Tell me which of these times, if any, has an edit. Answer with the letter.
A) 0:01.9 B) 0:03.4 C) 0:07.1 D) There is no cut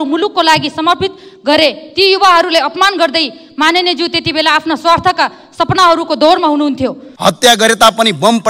C